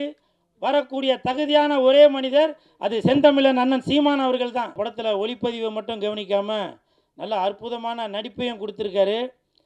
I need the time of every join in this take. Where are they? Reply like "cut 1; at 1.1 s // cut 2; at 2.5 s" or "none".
cut 1; at 4.8 s